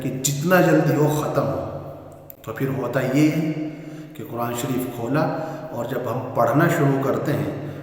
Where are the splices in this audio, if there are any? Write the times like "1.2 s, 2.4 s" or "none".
none